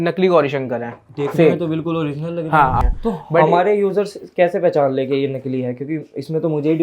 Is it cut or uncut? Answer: cut